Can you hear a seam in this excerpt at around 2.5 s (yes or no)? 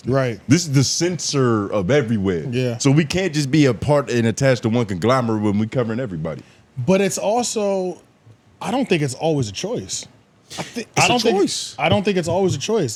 no